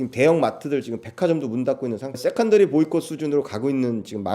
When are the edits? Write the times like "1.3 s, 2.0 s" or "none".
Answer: 2.2 s

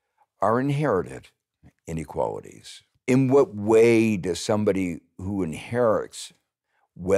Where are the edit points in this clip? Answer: 3.0 s

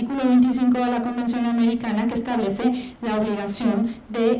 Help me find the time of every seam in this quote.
1.3 s

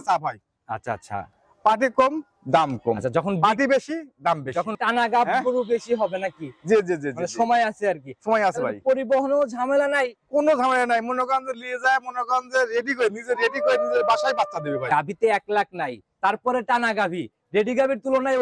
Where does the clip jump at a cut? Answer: 4.8 s, 14.8 s

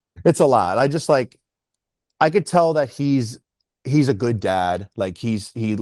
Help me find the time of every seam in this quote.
none

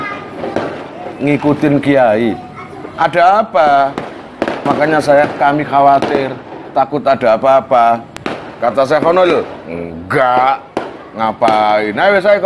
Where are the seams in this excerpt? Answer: 4.6 s

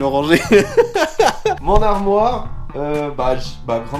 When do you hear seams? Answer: none

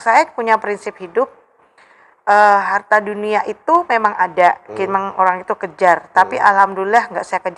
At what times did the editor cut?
none

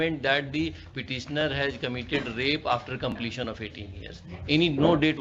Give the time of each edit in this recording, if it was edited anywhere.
none

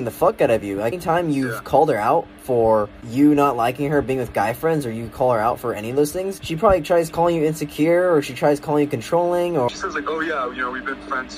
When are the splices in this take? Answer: 1.0 s, 3.0 s, 6.4 s, 9.7 s

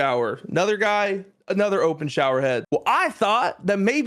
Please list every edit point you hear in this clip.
2.6 s

